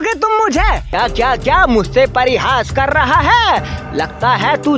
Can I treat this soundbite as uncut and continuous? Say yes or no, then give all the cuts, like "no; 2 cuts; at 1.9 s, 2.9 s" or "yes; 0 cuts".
no; 1 cut; at 0.9 s